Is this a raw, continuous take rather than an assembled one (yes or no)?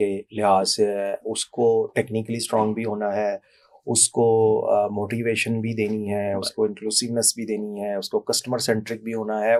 yes